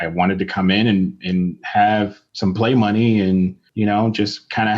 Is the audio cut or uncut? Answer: cut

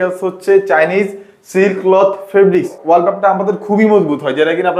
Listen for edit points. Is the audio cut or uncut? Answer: cut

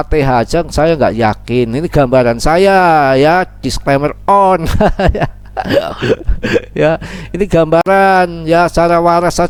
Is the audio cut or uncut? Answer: uncut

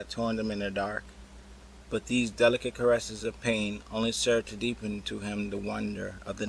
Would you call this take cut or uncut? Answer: cut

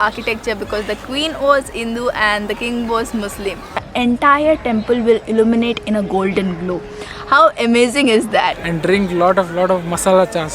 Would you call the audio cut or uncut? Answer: cut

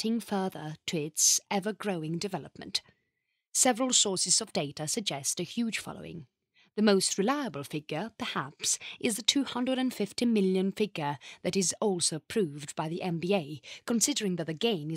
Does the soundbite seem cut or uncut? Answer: cut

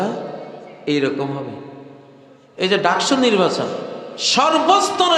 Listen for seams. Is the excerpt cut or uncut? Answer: cut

